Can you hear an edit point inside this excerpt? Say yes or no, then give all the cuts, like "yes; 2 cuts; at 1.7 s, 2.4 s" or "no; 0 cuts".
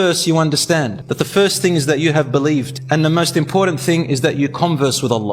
yes; 2 cuts; at 1.0 s, 2.8 s